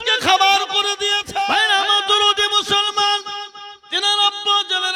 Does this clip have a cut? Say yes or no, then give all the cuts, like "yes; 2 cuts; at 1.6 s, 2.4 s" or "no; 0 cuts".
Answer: yes; 1 cut; at 1.2 s